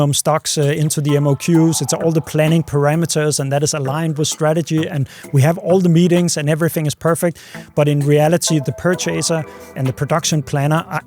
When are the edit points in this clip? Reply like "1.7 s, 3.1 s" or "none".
8.6 s, 9.8 s